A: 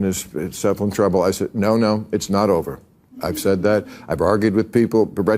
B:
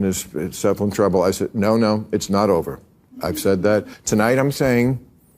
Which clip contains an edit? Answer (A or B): B